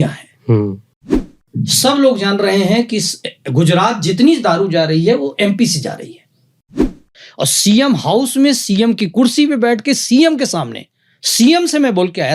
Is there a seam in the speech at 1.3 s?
yes; 2 cuts; at 1.3 s, 6.8 s

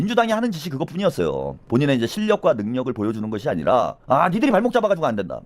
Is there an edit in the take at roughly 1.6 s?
yes; 1 cut; at 1.6 s

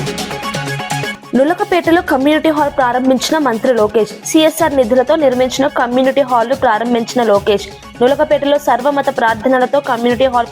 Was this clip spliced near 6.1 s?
no; 1 cut; at 1.2 s

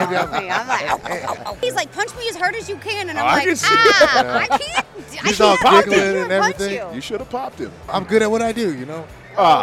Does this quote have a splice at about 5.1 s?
no; 2 cuts; at 1.6 s, 7.9 s

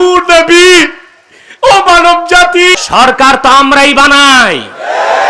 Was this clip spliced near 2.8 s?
yes; 1 cut; at 2.8 s

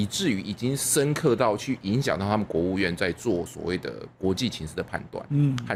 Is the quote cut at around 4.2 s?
no; 0 cuts

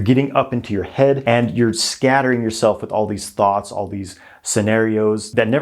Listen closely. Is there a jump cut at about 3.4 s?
no; 1 cut; at 1.2 s

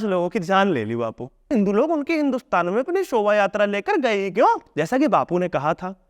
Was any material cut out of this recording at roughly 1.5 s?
yes; 2 cuts; at 1.5 s, 4.7 s

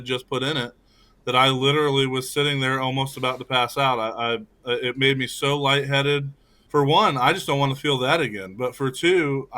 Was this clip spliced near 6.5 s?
yes; 1 cut; at 6.5 s

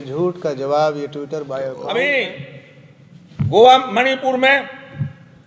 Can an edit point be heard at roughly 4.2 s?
no; 1 cut; at 1.8 s

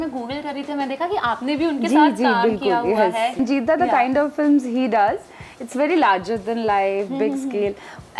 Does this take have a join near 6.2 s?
no; 1 cut; at 3.4 s

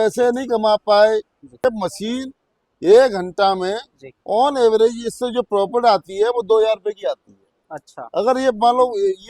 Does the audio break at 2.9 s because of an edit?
no; 1 cut; at 1.6 s

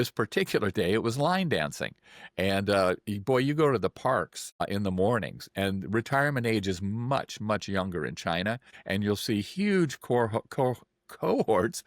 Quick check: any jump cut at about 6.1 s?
no; 2 cuts; at 4.6 s, 8.7 s

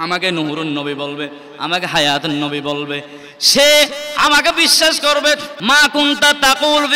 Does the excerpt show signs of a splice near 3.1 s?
no; 1 cut; at 5.5 s

